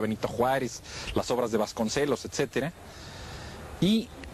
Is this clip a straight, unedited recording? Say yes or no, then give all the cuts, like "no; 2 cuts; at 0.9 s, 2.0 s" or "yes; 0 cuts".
no; 1 cut; at 1.9 s